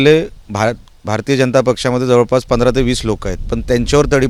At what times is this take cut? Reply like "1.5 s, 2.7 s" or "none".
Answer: none